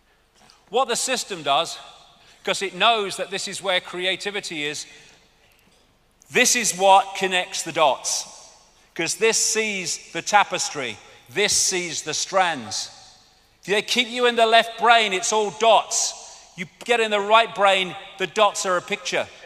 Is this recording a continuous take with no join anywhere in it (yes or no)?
no